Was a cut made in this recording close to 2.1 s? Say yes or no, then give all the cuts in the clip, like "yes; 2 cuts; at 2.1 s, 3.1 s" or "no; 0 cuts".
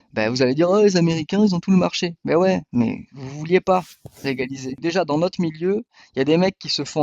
no; 1 cut; at 4.7 s